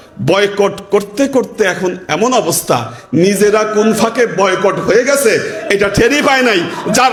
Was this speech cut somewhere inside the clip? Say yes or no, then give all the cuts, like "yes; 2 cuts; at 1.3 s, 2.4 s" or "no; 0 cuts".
no; 0 cuts